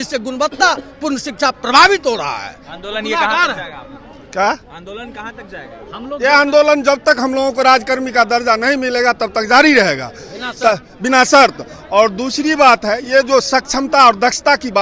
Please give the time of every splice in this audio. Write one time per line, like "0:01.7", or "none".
none